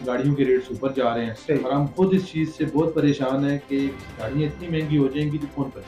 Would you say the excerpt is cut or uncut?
uncut